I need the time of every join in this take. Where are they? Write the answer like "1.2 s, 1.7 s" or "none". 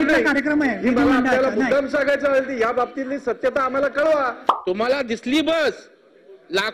4.5 s